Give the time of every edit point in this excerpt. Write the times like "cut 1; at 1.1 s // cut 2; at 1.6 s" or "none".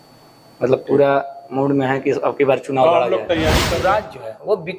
cut 1; at 3.7 s